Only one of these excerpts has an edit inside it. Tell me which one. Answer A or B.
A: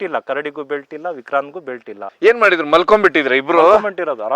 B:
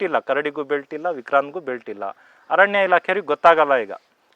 A